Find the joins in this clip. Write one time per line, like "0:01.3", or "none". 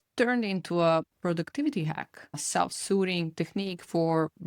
0:01.1
0:02.4